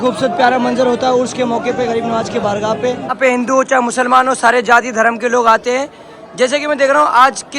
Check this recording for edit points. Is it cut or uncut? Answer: cut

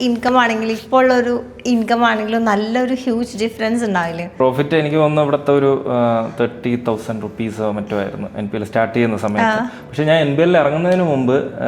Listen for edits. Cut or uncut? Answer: cut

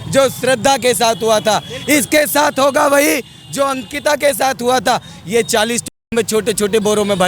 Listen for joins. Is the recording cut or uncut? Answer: uncut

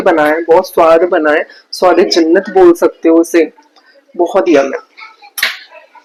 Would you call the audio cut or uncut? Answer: uncut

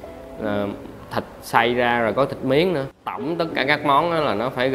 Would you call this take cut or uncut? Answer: cut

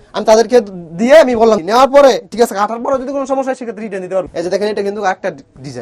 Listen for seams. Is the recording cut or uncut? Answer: cut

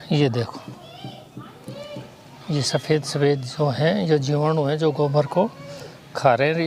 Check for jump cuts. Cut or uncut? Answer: uncut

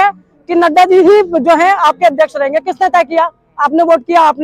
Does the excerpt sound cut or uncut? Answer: uncut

